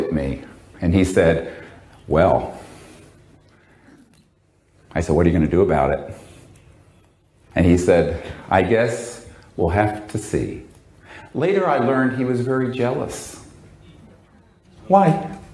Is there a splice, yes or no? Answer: no